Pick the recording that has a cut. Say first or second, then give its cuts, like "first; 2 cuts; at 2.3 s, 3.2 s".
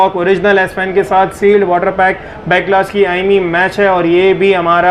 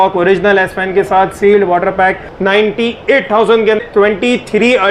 second; 2 cuts; at 2.3 s, 3.8 s